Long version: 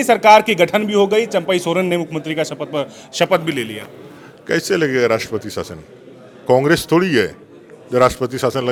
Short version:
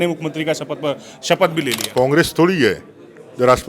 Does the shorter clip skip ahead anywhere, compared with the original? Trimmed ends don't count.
yes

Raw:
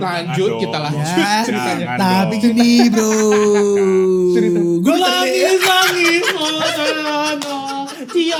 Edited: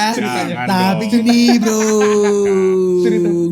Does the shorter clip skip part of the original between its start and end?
no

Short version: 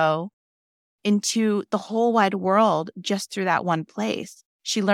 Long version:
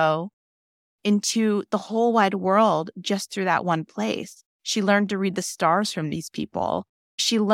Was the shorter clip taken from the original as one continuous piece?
yes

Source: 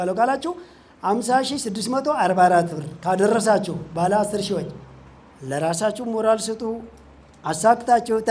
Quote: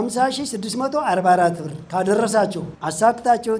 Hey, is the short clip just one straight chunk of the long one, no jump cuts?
no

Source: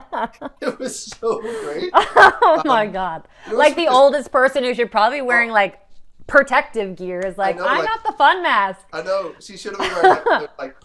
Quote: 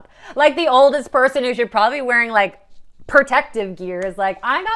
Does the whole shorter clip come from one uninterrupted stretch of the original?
yes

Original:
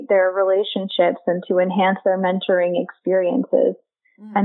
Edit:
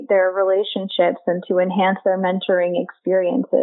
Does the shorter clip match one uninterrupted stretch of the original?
yes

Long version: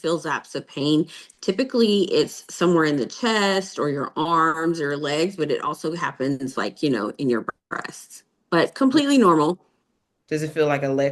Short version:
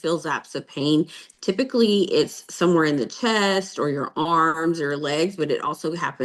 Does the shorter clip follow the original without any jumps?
yes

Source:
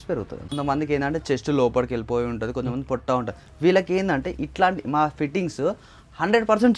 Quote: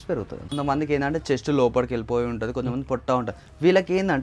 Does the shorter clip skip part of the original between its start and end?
no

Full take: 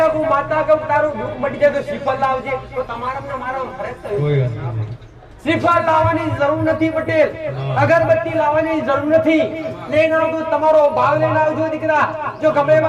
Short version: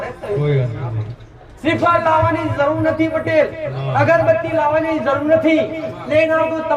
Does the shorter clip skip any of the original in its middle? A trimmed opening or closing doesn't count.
no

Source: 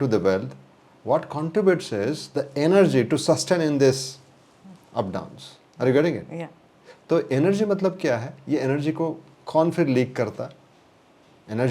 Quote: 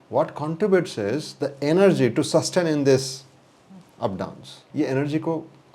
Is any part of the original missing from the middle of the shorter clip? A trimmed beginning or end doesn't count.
yes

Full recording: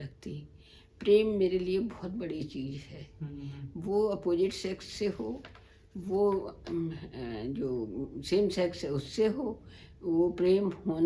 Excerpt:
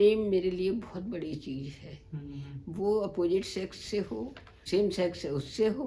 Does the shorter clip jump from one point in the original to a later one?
yes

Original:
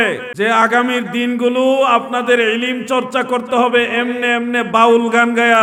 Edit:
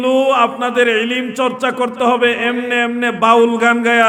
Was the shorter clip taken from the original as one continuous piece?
yes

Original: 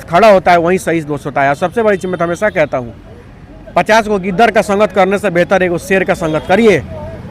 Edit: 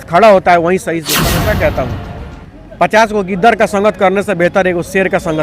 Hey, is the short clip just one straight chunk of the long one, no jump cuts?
no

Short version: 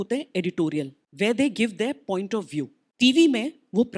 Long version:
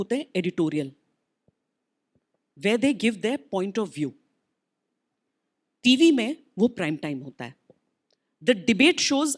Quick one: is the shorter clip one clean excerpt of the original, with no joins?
no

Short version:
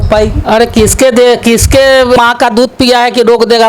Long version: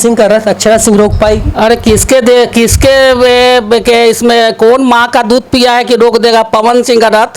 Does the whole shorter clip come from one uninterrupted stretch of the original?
no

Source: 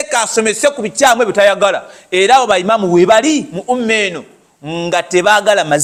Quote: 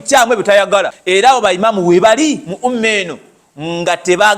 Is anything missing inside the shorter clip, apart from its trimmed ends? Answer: yes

